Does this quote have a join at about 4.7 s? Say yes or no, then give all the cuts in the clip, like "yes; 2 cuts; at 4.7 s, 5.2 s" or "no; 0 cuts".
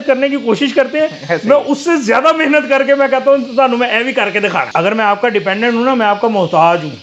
yes; 1 cut; at 4.7 s